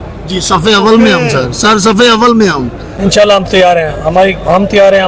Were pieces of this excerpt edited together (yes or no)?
yes